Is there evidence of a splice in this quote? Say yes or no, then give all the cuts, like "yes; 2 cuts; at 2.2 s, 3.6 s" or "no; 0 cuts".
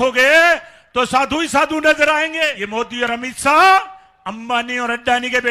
yes; 1 cut; at 2.5 s